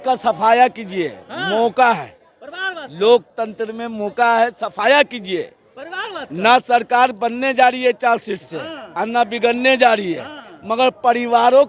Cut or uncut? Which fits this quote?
uncut